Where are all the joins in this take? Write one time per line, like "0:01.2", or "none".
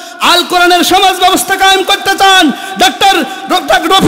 none